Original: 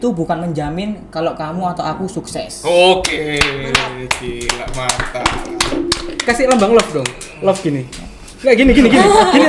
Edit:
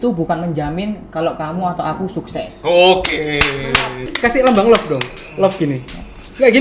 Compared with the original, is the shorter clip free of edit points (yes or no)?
no